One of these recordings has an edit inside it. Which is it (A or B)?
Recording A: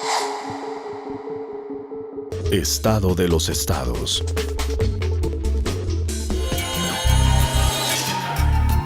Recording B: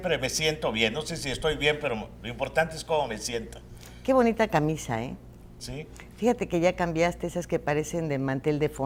A